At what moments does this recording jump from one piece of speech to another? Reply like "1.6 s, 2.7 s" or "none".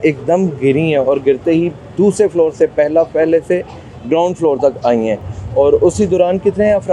none